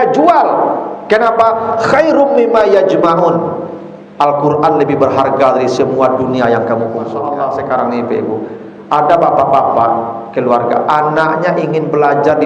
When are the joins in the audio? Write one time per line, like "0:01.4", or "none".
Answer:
0:07.2

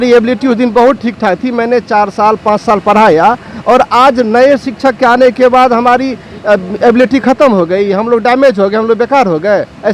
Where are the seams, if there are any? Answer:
none

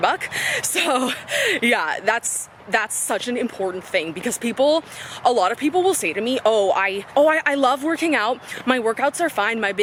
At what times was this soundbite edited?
none

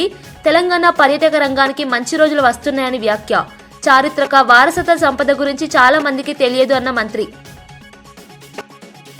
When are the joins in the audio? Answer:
none

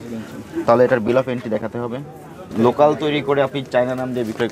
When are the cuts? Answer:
0:02.4

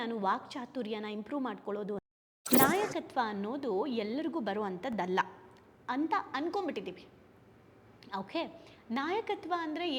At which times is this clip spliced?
0:02.0

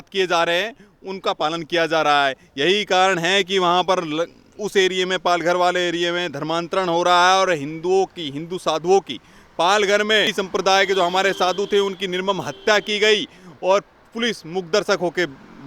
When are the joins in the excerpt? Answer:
none

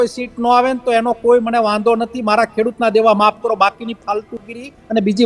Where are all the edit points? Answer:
none

